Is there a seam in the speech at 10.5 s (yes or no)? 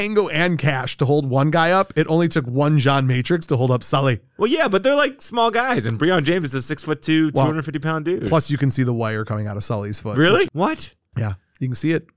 yes